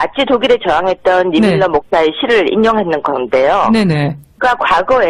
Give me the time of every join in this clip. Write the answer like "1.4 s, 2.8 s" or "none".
3.0 s